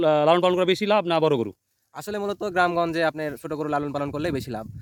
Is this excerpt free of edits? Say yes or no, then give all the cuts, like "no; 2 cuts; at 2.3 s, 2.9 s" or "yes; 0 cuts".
yes; 0 cuts